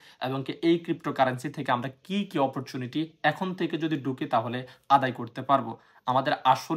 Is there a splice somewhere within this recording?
no; 0 cuts

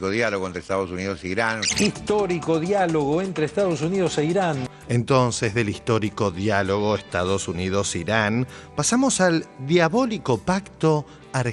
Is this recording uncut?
no; 1 cut; at 4.7 s

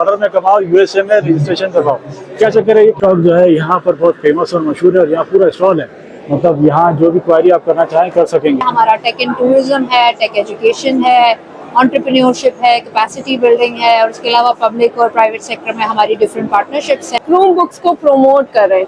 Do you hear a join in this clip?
yes; 3 cuts; at 3.0 s, 8.6 s, 17.2 s

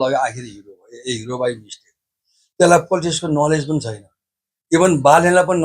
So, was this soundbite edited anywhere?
no; 0 cuts

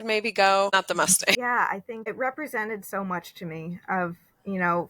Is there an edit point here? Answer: yes; 1 cut; at 1.0 s

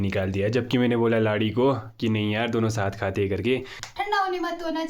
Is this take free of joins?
no; 1 cut; at 3.9 s

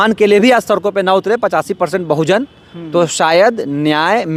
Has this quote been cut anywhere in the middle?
no; 0 cuts

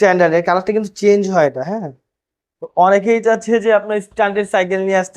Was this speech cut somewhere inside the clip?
yes; 1 cut; at 2.6 s

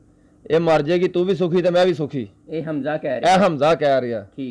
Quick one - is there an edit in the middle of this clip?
no; 0 cuts

